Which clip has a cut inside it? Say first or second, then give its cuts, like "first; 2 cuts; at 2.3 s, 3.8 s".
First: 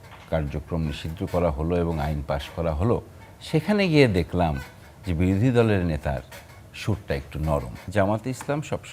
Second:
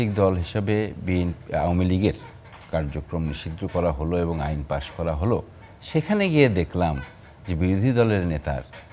first; 1 cut; at 7.8 s